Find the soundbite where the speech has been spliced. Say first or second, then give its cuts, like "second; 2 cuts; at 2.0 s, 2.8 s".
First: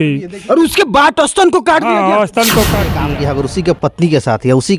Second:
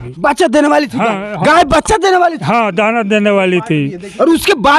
first; 1 cut; at 3.0 s